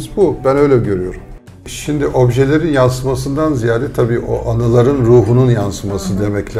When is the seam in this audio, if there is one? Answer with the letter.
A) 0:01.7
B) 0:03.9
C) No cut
A